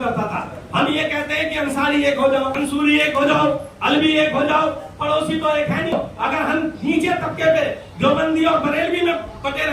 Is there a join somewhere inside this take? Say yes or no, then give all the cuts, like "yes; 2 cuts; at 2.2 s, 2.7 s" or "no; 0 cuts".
yes; 2 cuts; at 2.5 s, 5.9 s